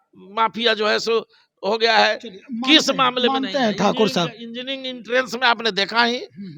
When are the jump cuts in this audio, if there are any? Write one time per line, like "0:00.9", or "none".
none